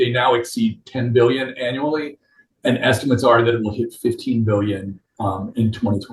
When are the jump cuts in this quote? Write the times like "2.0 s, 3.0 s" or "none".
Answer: none